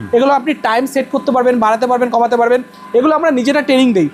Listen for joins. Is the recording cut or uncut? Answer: uncut